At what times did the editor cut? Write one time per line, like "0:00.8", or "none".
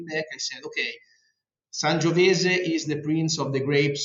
none